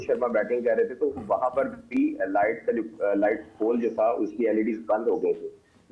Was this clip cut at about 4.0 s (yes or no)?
no